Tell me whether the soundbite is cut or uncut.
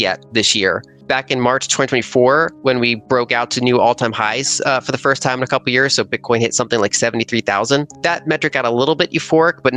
cut